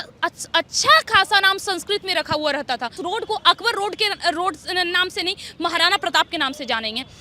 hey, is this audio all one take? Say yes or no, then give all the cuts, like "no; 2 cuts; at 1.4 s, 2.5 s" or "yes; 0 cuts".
no; 1 cut; at 3.0 s